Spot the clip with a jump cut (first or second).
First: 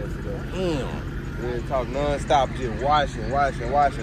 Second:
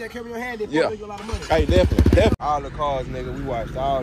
second